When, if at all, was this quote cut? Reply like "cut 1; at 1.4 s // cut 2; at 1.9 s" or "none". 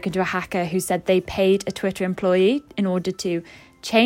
none